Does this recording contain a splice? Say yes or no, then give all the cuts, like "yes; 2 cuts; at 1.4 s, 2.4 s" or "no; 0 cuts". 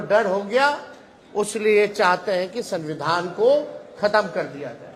no; 0 cuts